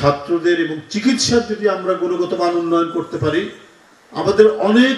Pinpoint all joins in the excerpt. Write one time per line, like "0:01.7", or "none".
none